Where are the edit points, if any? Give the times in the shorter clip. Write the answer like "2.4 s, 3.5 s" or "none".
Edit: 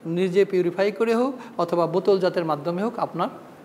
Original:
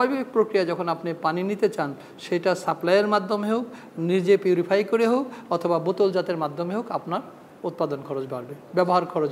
none